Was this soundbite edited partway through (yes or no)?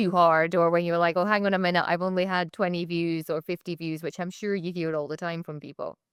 no